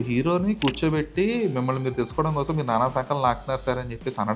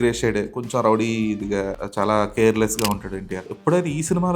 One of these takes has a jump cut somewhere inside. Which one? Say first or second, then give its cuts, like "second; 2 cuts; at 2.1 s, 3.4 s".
second; 2 cuts; at 1.8 s, 3.4 s